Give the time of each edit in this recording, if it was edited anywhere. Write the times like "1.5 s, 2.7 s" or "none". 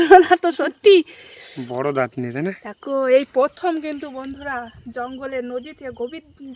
none